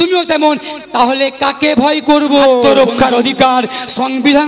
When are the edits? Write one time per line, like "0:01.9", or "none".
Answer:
0:02.6